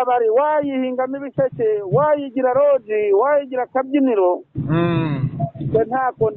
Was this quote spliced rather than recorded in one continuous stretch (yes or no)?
no